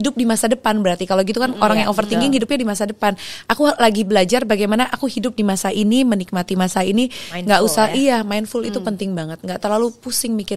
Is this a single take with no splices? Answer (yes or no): yes